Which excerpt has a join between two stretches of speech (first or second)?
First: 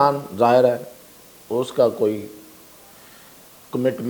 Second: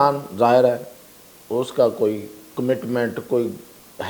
second